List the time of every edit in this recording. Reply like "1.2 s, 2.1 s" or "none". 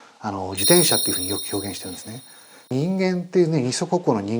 2.7 s